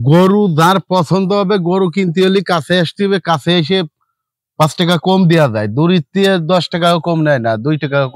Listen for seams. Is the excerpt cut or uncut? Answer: uncut